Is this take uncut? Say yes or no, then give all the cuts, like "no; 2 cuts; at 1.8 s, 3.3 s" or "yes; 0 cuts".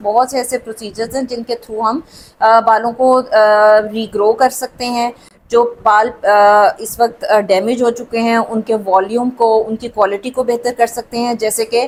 yes; 0 cuts